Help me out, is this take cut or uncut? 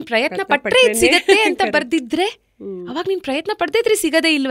uncut